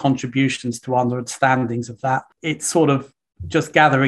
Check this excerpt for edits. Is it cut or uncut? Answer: cut